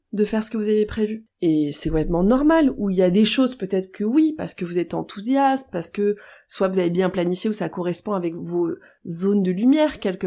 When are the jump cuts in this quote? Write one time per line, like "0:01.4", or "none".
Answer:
0:01.2